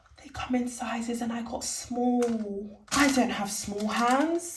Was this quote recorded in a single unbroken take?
no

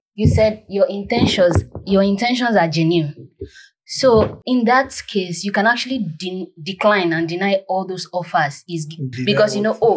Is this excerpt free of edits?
no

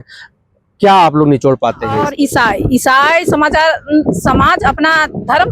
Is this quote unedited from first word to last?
no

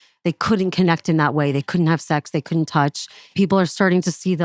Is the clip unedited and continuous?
no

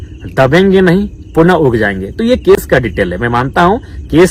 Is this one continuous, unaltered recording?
yes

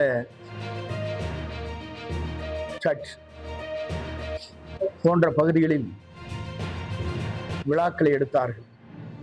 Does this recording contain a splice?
yes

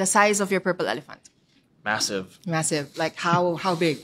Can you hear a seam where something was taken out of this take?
yes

